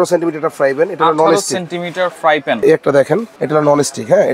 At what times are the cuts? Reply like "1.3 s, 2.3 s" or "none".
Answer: 2.6 s